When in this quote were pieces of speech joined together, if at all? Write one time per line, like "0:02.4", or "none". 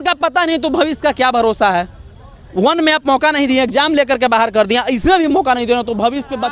none